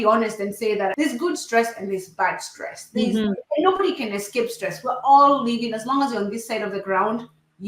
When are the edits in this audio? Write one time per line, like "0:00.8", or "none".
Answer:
0:00.9